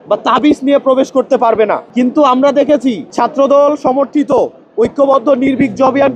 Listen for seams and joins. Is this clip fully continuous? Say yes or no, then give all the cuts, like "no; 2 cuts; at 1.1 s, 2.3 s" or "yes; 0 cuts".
no; 2 cuts; at 1.8 s, 3.1 s